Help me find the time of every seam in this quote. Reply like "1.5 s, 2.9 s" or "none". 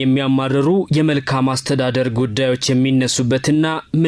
none